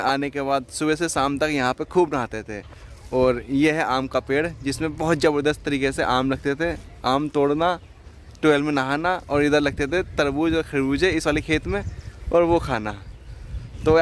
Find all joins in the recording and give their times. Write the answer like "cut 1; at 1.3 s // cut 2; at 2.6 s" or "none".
none